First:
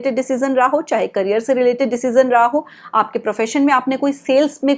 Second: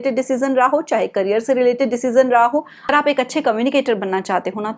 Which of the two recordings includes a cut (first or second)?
second